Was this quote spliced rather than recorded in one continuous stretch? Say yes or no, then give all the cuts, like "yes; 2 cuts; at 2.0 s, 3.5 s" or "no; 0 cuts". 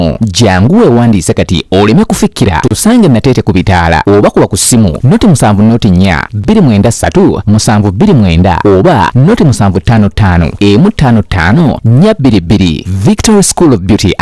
no; 0 cuts